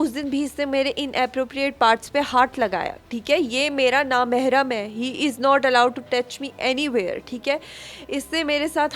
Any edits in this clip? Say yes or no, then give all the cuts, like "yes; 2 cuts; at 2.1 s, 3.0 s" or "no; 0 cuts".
no; 0 cuts